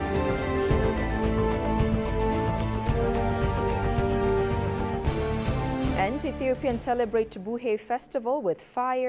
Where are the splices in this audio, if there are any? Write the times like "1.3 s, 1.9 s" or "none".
none